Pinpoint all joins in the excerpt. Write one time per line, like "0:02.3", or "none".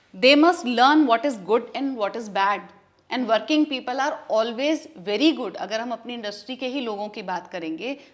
none